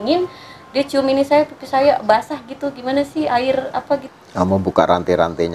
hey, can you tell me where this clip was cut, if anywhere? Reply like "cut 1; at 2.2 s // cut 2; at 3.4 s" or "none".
cut 1; at 4.1 s